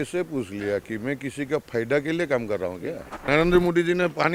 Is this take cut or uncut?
cut